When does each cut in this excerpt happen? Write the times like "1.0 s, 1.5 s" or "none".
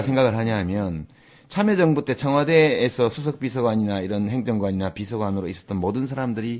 none